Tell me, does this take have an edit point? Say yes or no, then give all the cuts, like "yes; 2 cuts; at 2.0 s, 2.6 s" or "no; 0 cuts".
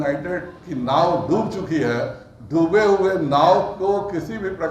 no; 0 cuts